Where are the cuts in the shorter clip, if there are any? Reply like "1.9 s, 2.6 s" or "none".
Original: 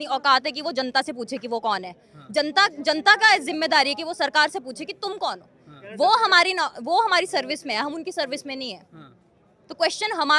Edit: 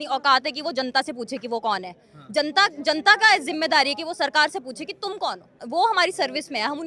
5.6 s